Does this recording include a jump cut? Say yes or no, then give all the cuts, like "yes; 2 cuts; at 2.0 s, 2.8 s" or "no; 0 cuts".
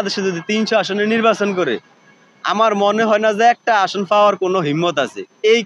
no; 0 cuts